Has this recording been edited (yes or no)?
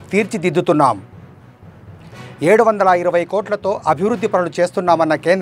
no